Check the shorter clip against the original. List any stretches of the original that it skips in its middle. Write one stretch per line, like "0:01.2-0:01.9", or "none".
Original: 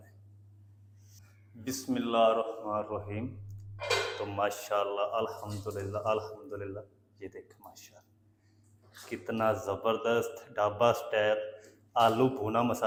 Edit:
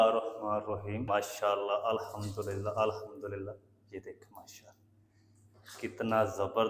0:03.3-0:04.3